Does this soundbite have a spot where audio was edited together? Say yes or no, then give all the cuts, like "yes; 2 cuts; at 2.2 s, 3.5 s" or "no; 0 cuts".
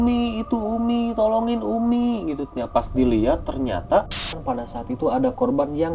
yes; 1 cut; at 4.4 s